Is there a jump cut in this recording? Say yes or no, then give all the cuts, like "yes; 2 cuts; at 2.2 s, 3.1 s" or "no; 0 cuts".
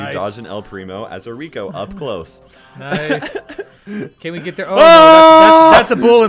no; 0 cuts